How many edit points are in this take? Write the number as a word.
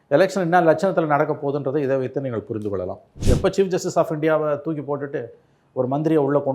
one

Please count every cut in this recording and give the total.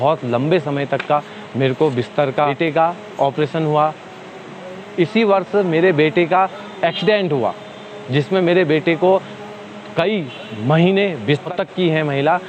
two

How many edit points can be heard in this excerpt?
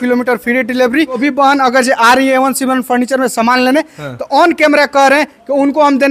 one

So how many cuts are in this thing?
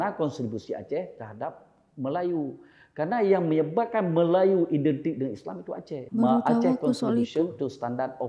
one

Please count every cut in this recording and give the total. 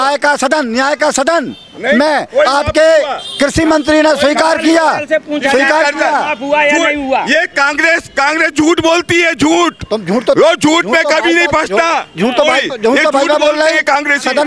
zero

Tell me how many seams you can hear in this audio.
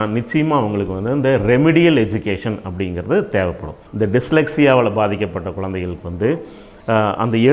one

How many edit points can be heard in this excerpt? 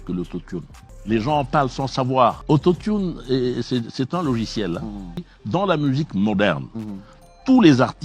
one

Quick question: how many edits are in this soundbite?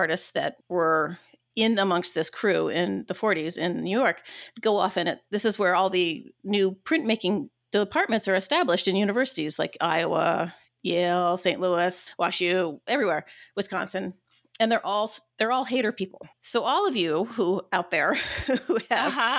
zero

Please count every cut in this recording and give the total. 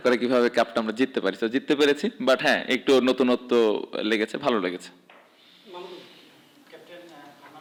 zero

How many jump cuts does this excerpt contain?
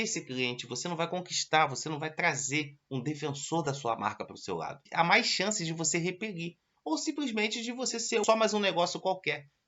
two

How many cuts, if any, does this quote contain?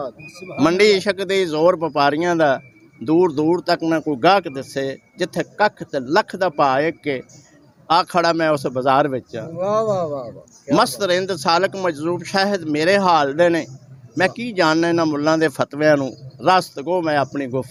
zero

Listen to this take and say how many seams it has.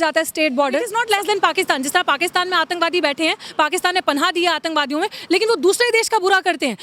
one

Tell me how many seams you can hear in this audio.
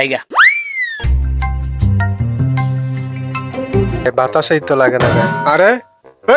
one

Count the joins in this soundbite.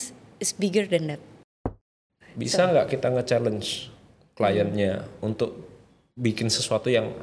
one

